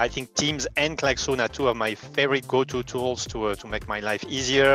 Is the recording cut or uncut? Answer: uncut